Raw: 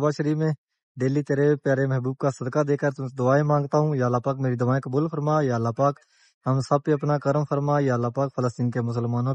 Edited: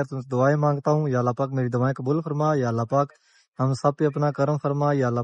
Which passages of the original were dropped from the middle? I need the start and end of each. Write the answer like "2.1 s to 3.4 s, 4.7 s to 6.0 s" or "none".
none